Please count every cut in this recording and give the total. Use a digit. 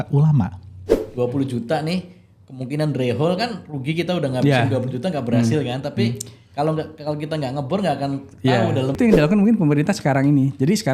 2